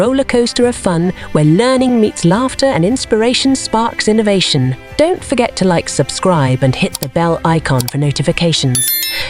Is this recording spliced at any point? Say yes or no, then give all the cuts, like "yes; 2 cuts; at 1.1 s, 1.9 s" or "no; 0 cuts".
no; 0 cuts